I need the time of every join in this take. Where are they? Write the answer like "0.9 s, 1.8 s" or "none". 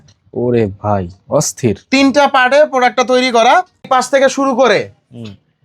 3.9 s